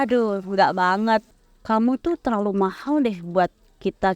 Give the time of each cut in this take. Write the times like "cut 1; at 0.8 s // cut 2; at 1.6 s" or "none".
cut 1; at 1.3 s